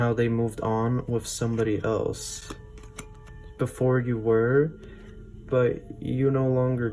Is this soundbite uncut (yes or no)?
yes